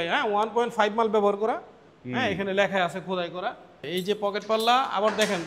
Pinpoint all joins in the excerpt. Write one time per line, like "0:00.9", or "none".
0:03.8